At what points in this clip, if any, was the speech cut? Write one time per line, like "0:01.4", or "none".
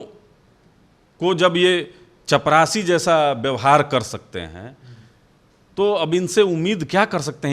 none